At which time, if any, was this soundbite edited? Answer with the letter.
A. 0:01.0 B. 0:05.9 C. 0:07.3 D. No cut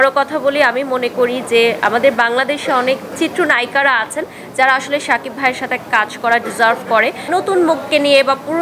C